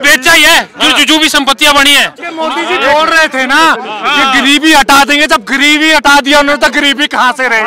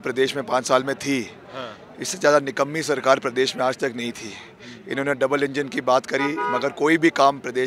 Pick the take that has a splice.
first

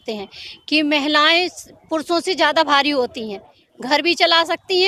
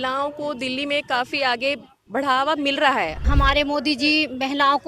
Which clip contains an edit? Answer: second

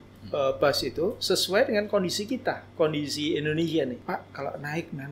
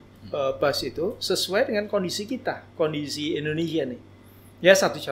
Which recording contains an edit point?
first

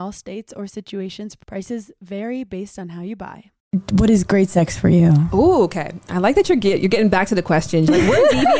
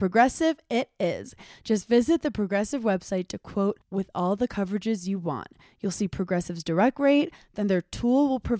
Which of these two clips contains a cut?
first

